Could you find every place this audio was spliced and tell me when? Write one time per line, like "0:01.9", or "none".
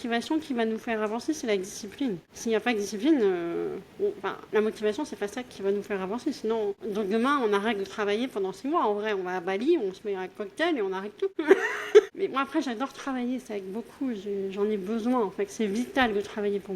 0:02.3
0:04.3
0:06.8
0:11.3
0:12.1